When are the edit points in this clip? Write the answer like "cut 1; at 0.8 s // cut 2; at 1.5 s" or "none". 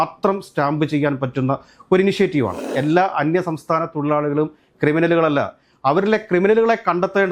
cut 1; at 2.7 s